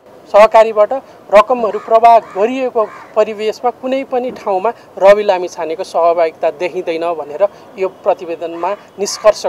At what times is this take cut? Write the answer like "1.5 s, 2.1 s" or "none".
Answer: none